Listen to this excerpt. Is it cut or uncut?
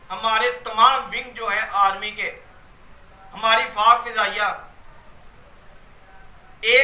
uncut